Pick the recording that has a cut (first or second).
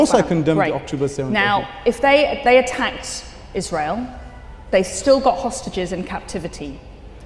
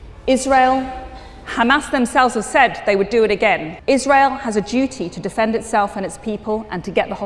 second